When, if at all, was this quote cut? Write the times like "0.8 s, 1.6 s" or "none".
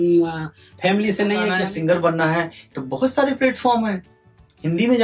1.5 s